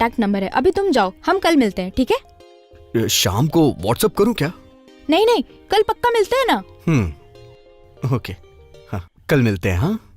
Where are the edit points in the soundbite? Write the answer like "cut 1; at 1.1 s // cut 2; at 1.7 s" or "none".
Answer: cut 1; at 9.1 s